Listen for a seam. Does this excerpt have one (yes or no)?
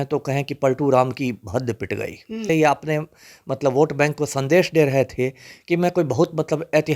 yes